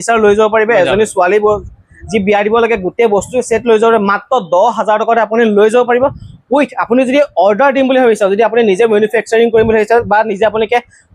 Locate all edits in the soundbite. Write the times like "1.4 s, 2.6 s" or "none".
none